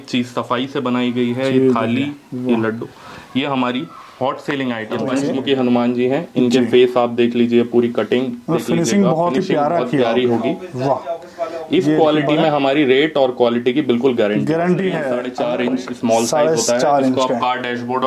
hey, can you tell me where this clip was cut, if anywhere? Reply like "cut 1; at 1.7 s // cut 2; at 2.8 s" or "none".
cut 1; at 5.0 s // cut 2; at 15.3 s